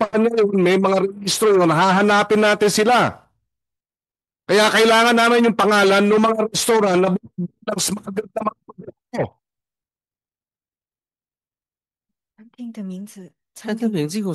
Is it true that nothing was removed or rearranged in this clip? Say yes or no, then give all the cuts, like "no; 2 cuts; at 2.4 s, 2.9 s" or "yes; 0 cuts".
yes; 0 cuts